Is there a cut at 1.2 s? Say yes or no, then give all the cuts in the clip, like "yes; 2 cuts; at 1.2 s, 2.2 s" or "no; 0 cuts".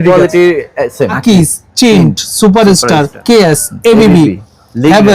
yes; 2 cuts; at 1.2 s, 3.1 s